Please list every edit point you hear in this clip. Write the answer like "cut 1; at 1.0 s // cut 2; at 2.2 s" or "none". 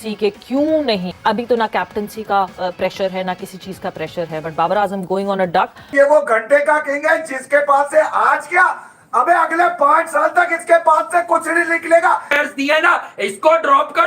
cut 1; at 1.1 s // cut 2; at 5.9 s // cut 3; at 12.3 s